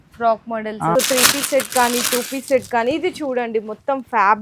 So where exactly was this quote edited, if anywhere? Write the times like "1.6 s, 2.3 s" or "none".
0.9 s